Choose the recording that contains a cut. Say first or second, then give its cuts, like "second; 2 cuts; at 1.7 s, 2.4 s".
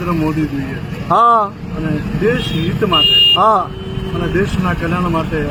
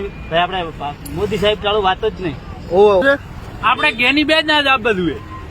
second; 1 cut; at 3.0 s